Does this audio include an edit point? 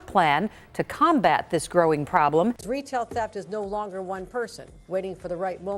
yes; 1 cut; at 2.6 s

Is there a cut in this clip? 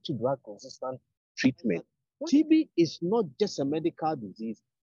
yes; 1 cut; at 2.0 s

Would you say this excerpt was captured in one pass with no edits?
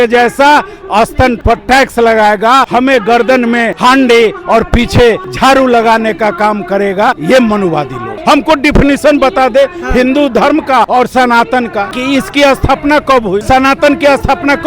no; 9 cuts; at 1.4 s, 2.7 s, 3.7 s, 5.3 s, 7.2 s, 8.1 s, 10.9 s, 11.9 s, 13.4 s

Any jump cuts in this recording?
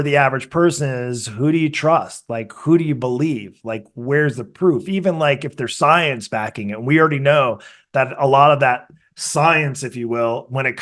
no; 0 cuts

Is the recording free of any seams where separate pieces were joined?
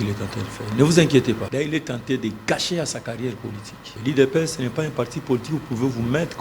no; 2 cuts; at 1.5 s, 4.0 s

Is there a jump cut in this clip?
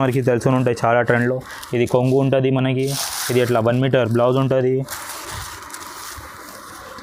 no; 0 cuts

